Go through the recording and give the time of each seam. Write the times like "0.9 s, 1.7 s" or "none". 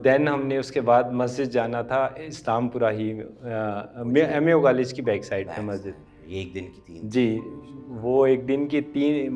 none